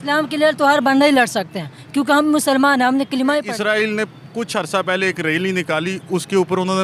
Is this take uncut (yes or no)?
no